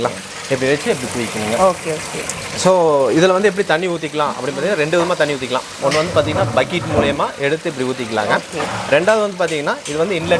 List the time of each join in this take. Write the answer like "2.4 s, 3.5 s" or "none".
none